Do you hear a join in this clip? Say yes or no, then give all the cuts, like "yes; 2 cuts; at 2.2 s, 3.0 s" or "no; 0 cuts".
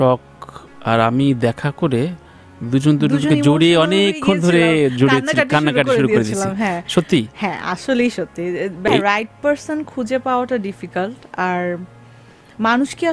yes; 1 cut; at 8.9 s